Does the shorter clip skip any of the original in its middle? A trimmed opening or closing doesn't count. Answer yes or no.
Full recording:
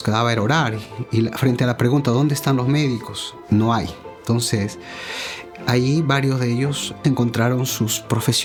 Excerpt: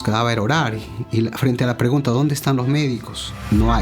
no